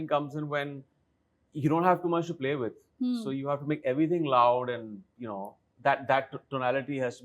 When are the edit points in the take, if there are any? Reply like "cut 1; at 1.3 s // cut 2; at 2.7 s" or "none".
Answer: none